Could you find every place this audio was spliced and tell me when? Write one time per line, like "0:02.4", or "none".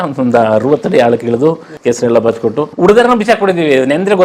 0:01.7
0:02.7